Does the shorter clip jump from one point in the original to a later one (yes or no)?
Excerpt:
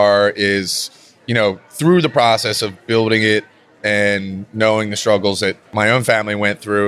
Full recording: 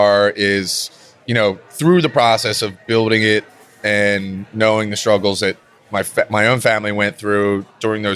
yes